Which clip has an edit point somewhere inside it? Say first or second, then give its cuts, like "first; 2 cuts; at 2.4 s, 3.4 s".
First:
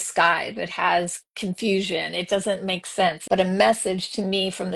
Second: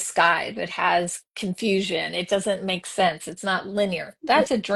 first; 1 cut; at 3.2 s